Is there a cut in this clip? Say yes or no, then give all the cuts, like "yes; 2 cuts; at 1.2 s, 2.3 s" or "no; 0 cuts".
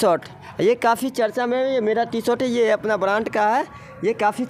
no; 0 cuts